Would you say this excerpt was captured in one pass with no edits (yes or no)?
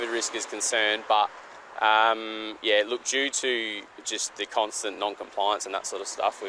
yes